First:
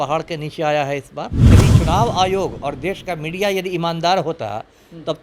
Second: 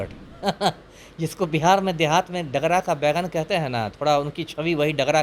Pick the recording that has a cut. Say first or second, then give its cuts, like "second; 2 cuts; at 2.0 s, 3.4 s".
first; 1 cut; at 1.6 s